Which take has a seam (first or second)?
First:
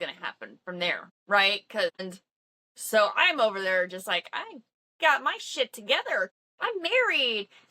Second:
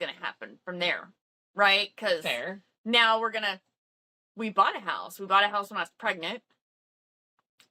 first